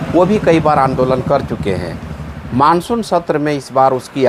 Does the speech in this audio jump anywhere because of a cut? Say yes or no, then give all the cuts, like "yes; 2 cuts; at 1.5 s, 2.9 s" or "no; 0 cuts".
no; 0 cuts